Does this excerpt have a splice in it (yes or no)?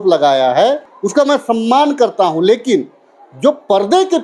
yes